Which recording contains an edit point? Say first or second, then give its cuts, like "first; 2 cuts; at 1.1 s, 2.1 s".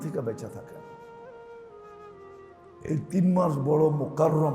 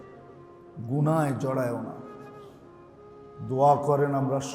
first; 2 cuts; at 1.0 s, 2.8 s